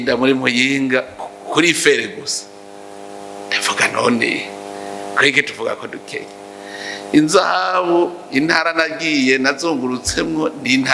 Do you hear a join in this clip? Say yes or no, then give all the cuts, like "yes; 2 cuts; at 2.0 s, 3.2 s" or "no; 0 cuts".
no; 0 cuts